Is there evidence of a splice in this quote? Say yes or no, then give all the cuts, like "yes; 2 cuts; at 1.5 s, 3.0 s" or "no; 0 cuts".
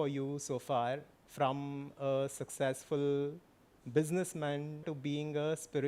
yes; 1 cut; at 4.9 s